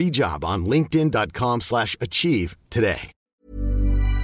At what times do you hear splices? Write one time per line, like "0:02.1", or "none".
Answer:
0:03.1